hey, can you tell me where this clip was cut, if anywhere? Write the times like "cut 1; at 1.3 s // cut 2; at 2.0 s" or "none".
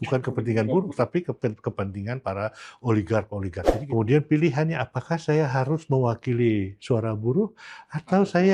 cut 1; at 3.7 s